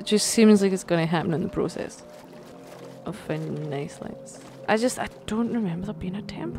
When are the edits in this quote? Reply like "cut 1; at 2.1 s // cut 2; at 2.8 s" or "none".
none